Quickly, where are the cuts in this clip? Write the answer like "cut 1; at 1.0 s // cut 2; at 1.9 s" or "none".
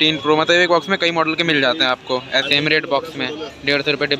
cut 1; at 2.5 s